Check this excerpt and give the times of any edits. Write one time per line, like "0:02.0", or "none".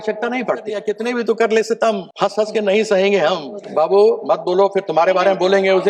0:00.8
0:02.1
0:03.6